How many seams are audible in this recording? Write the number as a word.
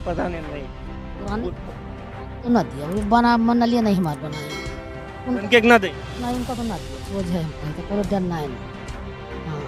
zero